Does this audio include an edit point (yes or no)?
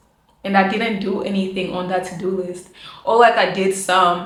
no